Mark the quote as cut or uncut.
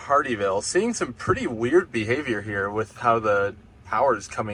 uncut